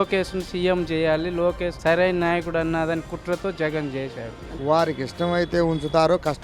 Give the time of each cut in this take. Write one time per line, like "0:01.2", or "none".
0:04.5